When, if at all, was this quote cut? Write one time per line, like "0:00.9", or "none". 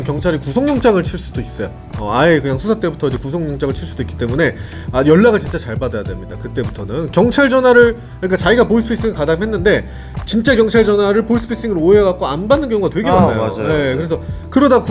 none